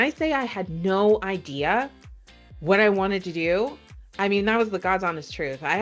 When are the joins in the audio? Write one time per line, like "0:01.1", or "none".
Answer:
none